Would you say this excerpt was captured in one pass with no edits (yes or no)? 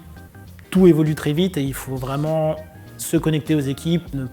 yes